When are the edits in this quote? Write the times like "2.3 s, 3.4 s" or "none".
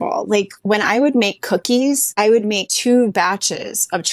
2.5 s